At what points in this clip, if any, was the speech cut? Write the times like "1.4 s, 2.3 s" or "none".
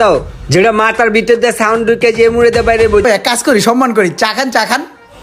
3.0 s

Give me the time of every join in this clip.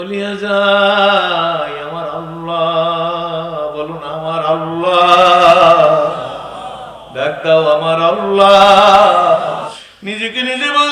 9.8 s

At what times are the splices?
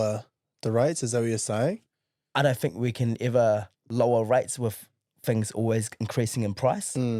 none

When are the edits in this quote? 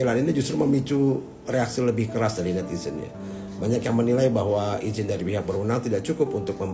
none

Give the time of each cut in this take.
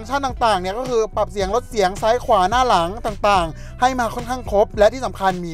none

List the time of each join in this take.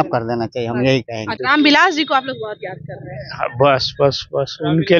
1.3 s

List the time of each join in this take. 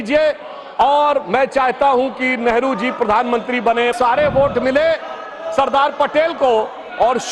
3.9 s

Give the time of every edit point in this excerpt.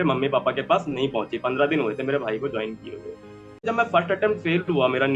3.6 s

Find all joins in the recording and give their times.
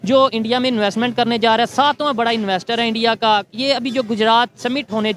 none

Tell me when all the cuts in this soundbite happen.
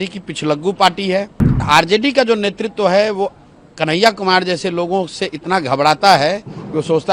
1.6 s

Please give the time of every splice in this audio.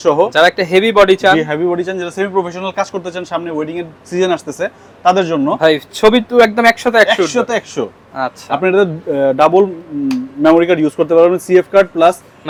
none

